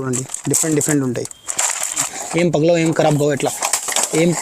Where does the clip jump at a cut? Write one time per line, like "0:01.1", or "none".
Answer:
0:02.0